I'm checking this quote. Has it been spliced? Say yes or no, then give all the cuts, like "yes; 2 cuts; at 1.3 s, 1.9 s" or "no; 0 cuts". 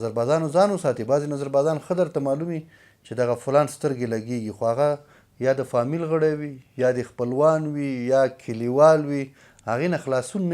no; 0 cuts